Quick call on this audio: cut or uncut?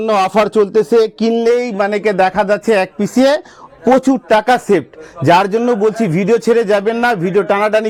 uncut